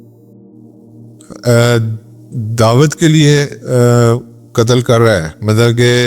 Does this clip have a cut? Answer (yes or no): yes